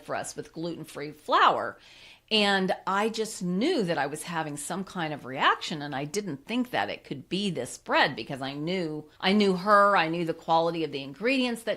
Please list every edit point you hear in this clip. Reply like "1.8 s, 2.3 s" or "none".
9.1 s